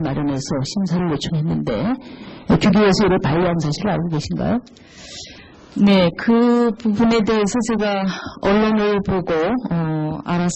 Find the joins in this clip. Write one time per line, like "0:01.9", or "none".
0:09.0